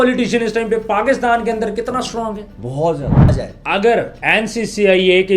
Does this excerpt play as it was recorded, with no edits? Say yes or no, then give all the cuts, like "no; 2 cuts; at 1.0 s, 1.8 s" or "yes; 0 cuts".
no; 1 cut; at 3.5 s